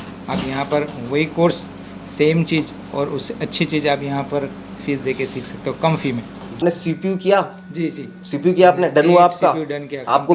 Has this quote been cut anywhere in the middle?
yes; 1 cut; at 6.6 s

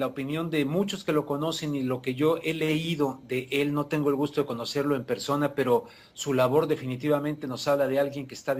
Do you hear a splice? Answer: yes; 1 cut; at 1.1 s

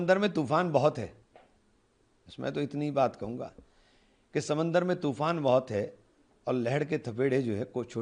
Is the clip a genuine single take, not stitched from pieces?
yes; 0 cuts

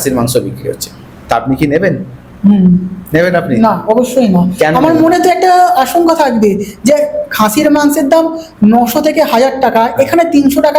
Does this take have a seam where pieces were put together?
no; 0 cuts

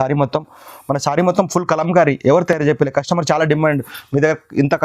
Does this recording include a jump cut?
no; 0 cuts

